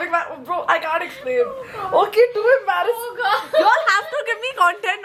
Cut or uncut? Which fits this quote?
uncut